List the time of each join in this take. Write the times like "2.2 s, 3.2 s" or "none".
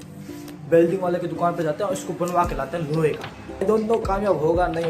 3.6 s